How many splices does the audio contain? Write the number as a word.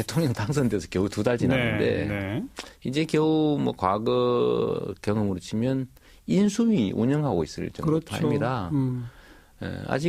one